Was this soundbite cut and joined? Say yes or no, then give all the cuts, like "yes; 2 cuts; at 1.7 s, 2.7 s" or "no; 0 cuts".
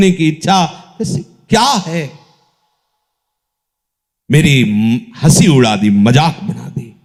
no; 0 cuts